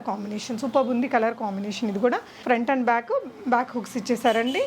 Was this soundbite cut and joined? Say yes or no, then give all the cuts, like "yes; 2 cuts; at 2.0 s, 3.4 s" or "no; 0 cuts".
yes; 1 cut; at 2.3 s